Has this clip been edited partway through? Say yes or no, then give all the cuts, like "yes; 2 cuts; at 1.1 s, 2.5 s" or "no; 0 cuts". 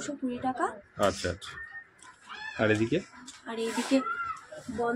no; 0 cuts